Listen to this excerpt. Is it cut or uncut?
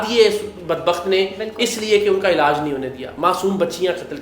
uncut